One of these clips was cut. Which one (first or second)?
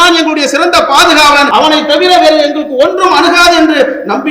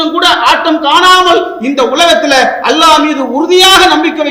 first